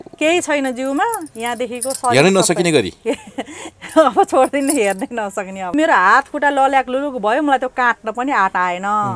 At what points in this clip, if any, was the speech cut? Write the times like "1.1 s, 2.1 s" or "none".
5.7 s